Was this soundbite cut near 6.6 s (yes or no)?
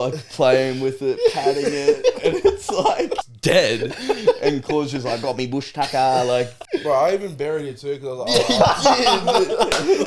yes